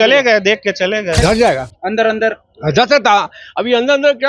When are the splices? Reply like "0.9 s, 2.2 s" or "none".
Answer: 1.2 s